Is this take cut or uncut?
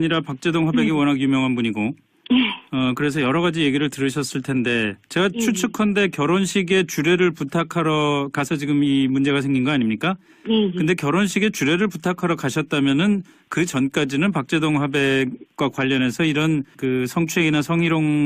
cut